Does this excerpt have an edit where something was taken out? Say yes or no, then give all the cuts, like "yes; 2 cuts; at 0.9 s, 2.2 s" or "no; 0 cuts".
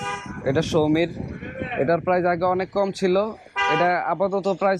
no; 0 cuts